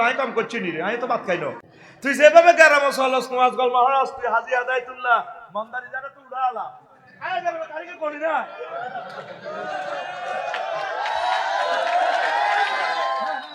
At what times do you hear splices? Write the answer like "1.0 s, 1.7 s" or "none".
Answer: 1.6 s